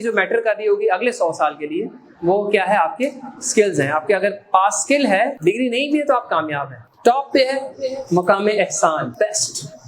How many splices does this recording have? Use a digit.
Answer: 3